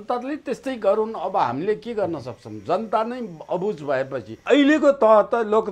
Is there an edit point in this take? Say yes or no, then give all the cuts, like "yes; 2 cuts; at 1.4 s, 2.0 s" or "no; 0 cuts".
yes; 1 cut; at 4.4 s